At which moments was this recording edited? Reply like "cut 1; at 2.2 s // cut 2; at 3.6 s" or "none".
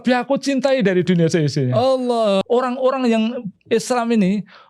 cut 1; at 2.4 s